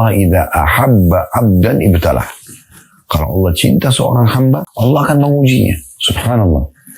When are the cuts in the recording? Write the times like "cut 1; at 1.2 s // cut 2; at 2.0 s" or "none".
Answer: cut 1; at 4.7 s

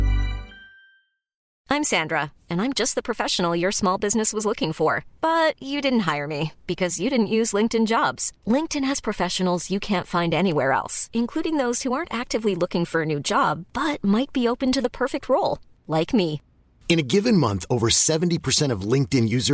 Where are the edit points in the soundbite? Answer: none

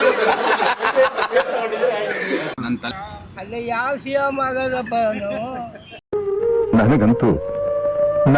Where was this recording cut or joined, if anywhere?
cut 1; at 2.9 s

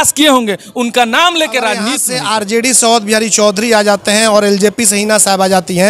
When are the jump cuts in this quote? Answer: cut 1; at 2.0 s

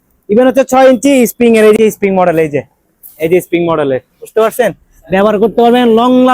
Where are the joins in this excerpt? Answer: cut 1; at 1.8 s

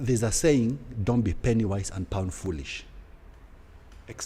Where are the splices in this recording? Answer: none

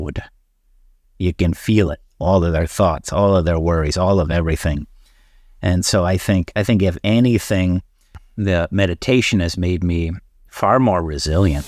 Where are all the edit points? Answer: cut 1; at 8.2 s

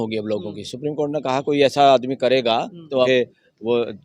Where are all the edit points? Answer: cut 1; at 3.1 s

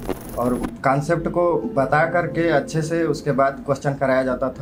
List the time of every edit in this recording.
none

